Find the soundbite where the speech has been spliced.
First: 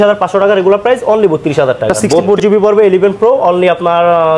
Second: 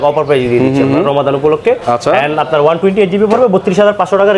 first; 1 cut; at 2.2 s

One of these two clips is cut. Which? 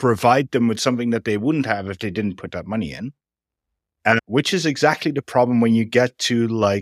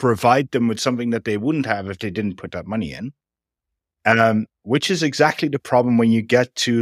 first; 1 cut; at 4.2 s

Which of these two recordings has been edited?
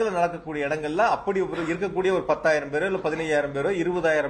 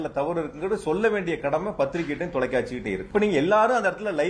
second; 1 cut; at 3.0 s

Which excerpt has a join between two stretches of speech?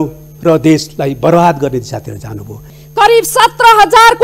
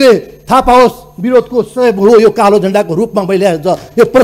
first; 1 cut; at 2.6 s

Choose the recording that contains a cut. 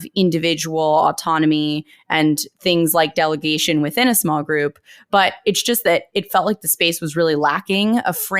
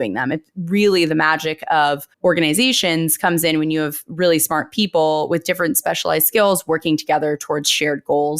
second; 1 cut; at 2.1 s

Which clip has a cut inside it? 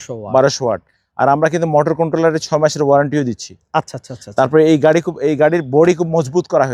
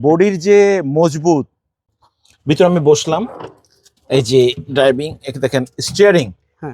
second; 1 cut; at 1.8 s

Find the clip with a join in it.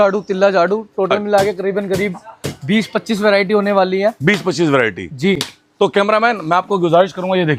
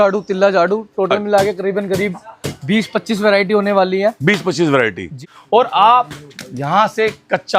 second; 1 cut; at 5.1 s

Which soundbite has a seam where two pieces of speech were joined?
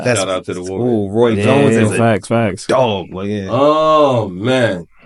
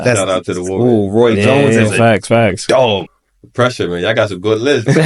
second; 1 cut; at 3.1 s

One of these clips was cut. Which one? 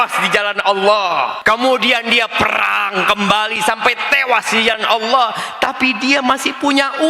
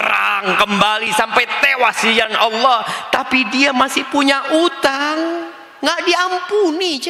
first; 1 cut; at 1.4 s

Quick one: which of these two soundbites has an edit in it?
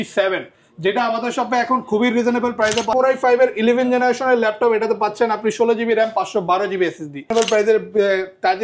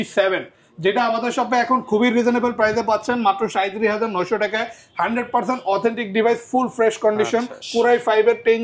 first; 2 cuts; at 2.9 s, 7.3 s

